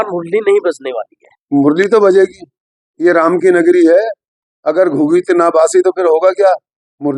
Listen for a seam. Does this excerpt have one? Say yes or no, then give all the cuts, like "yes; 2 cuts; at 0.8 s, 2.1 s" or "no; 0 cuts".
no; 0 cuts